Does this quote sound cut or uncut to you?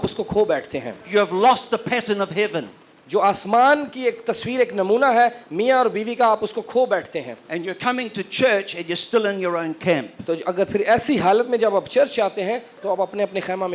uncut